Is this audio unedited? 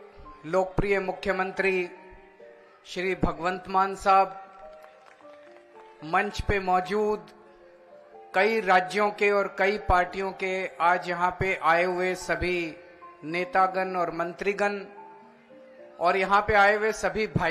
yes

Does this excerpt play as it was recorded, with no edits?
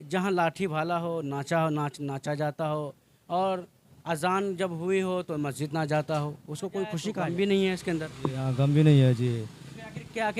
no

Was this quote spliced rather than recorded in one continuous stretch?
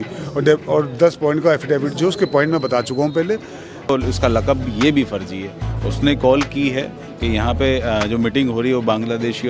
yes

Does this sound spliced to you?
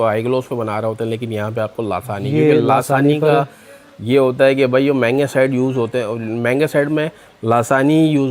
no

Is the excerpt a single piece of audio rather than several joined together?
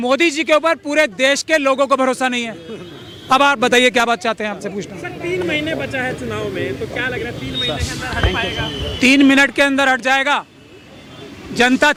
yes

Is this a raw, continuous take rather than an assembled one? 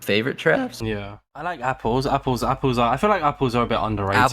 no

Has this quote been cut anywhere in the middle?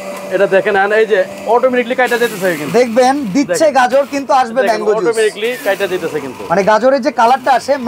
no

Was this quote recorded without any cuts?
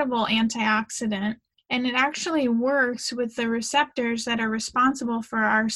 no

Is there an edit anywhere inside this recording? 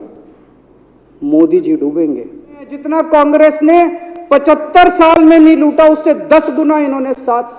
yes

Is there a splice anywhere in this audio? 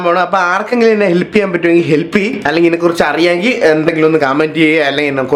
no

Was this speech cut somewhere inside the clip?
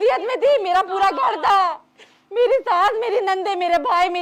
no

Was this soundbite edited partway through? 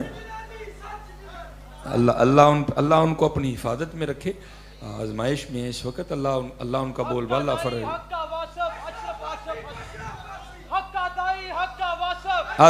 no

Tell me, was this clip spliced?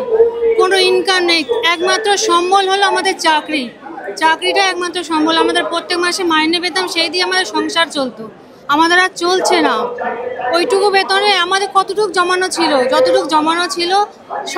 no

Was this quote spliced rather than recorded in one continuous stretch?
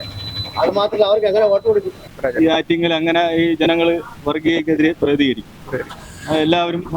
yes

